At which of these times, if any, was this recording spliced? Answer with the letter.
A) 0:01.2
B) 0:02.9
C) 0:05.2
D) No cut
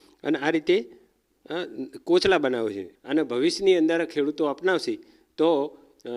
B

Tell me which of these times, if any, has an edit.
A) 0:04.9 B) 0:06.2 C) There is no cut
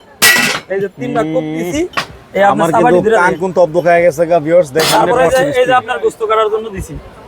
A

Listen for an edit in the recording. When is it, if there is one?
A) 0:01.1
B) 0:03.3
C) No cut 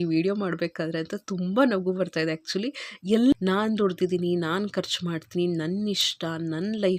B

